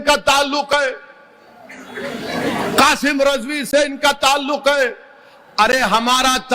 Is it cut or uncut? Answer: uncut